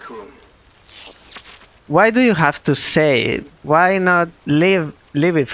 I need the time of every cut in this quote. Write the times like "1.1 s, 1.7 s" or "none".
1.7 s